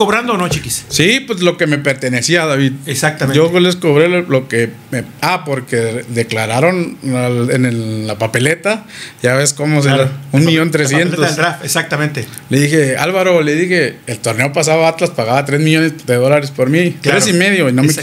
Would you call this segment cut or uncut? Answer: uncut